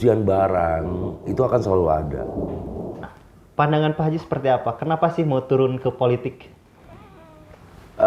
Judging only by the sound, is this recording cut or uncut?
cut